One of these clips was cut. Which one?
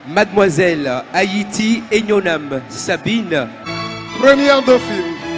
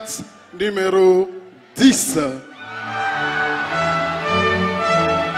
first; 1 cut; at 3.6 s

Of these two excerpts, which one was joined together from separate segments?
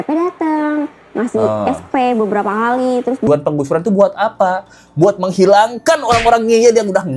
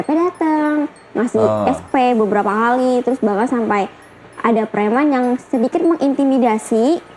first; 1 cut; at 3.3 s

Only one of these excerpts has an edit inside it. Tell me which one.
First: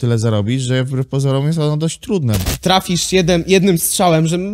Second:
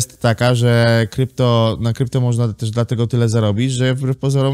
first; 1 cut; at 2.4 s

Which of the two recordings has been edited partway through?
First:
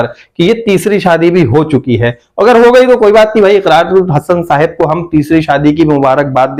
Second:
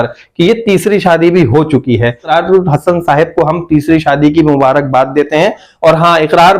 second; 2 cuts; at 2.3 s, 5.6 s

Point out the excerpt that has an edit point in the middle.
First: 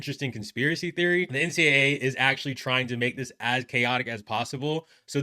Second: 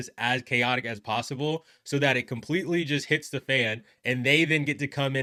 first; 1 cut; at 1.3 s

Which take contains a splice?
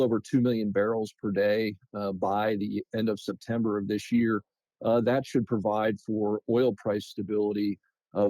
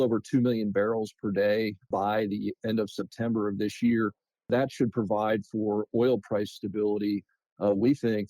second; 2 cuts; at 1.9 s, 4.5 s

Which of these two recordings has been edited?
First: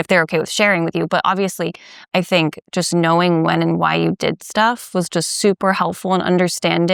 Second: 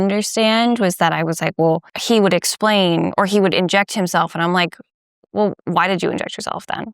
second; 1 cut; at 1.9 s

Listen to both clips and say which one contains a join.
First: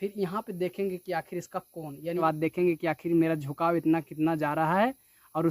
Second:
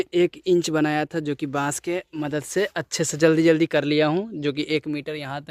first; 1 cut; at 2.2 s

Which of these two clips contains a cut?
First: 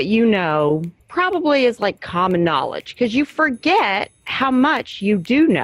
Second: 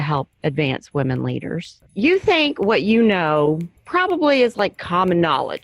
second; 1 cut; at 1.8 s

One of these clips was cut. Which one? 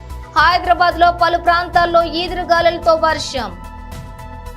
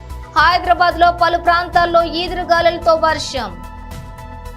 second; 1 cut; at 3.6 s

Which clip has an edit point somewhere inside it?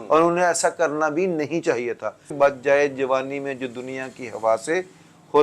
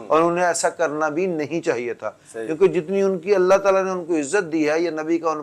first; 1 cut; at 2.3 s

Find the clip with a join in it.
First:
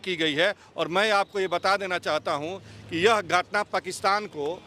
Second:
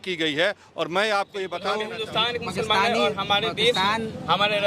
second; 1 cut; at 1.6 s

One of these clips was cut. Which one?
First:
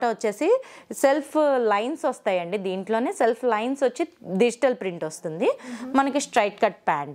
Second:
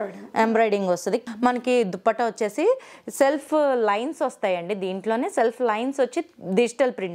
second; 1 cut; at 1.2 s

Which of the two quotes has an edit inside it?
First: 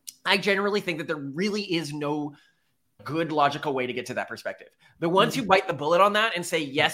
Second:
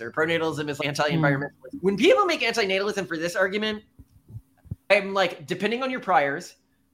second; 3 cuts; at 0.8 s, 1.6 s, 4.9 s

